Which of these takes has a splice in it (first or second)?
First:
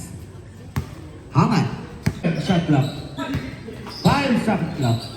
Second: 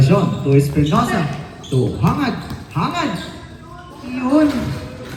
first